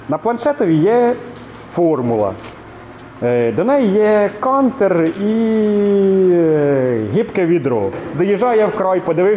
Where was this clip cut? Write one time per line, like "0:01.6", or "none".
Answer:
0:08.0